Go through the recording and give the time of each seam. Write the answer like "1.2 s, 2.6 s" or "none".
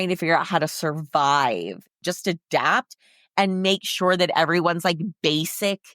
1.9 s

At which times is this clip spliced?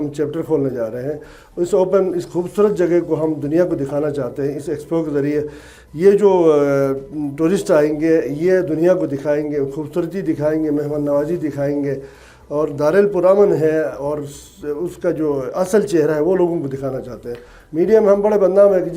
none

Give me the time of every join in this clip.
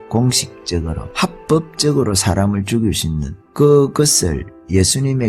1.0 s

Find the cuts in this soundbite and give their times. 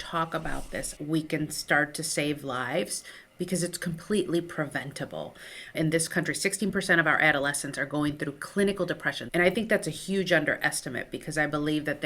0.9 s, 5.6 s, 9.1 s

